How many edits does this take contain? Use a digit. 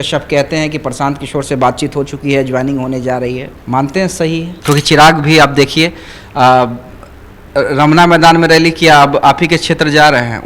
2